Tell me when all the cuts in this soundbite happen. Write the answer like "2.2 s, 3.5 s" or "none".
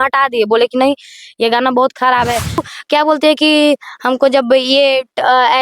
2.7 s